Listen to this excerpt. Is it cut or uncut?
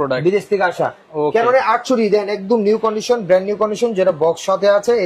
uncut